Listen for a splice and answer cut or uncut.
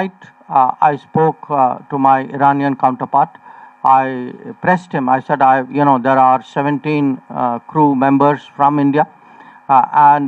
uncut